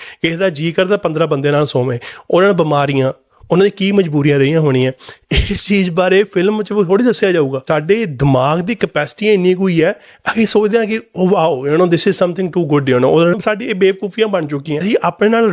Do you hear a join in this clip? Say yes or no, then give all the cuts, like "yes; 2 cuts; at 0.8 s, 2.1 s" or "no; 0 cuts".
yes; 3 cuts; at 7.6 s, 13.3 s, 14.8 s